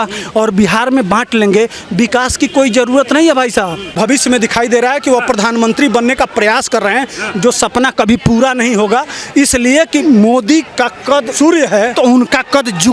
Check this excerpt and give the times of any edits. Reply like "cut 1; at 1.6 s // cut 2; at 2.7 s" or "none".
cut 1; at 3.9 s // cut 2; at 10.0 s // cut 3; at 11.3 s // cut 4; at 11.9 s